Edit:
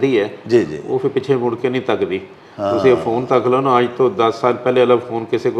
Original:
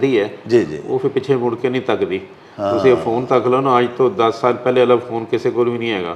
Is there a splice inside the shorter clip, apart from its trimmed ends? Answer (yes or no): no